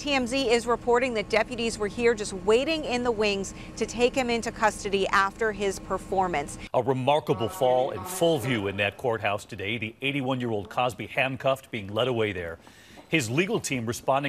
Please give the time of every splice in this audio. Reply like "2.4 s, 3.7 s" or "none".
6.6 s